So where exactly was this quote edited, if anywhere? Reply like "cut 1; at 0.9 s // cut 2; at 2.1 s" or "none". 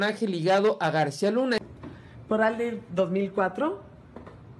cut 1; at 1.6 s